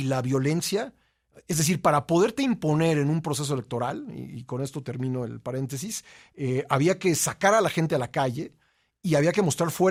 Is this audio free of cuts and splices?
yes; 0 cuts

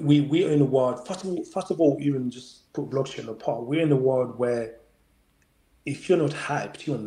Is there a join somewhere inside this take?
no; 0 cuts

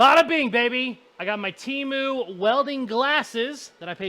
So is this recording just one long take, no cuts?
no; 1 cut; at 1.1 s

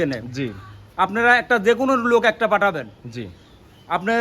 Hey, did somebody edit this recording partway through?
no; 0 cuts

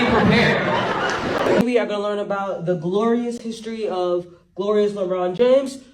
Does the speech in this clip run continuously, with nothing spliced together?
no; 1 cut; at 1.6 s

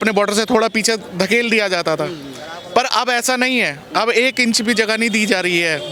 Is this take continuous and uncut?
yes; 0 cuts

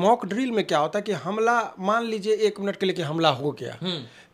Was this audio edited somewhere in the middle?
no; 0 cuts

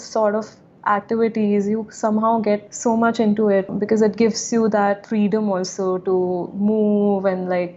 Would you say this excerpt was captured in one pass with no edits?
no; 2 cuts; at 2.7 s, 3.7 s

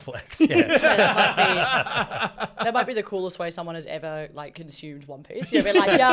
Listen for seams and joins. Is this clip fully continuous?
yes; 0 cuts

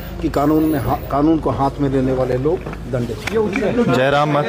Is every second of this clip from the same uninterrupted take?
yes; 0 cuts

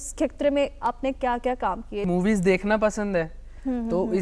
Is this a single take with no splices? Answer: no; 1 cut; at 2.1 s

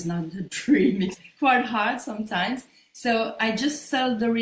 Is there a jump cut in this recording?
no; 0 cuts

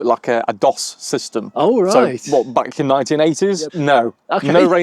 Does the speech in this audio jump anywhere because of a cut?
yes; 1 cut; at 3.6 s

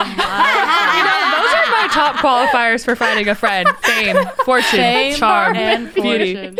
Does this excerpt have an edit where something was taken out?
no; 0 cuts

